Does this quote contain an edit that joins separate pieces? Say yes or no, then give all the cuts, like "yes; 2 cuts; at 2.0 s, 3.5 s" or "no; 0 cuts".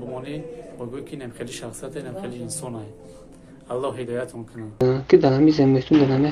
yes; 1 cut; at 5.0 s